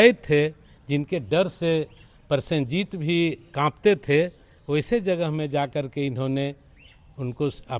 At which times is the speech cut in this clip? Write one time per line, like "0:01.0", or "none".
none